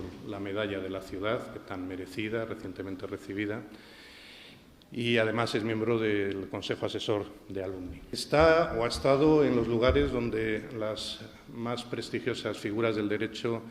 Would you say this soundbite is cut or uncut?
cut